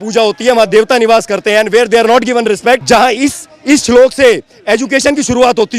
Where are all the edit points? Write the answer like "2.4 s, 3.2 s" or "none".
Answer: 2.8 s